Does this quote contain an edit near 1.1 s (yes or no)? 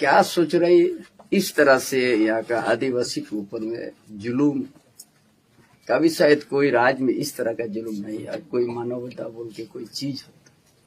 yes